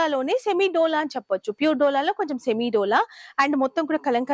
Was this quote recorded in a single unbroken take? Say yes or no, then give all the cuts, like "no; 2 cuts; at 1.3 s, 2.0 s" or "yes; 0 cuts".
yes; 0 cuts